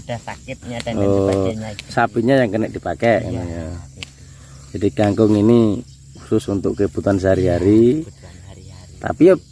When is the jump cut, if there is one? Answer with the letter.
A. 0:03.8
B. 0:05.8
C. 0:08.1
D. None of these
D